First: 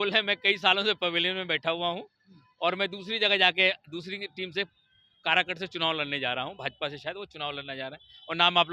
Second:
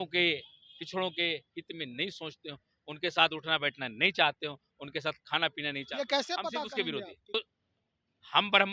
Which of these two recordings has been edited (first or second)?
second